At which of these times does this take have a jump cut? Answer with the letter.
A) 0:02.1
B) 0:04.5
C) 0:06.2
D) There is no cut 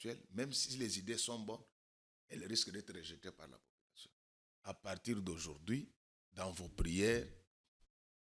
B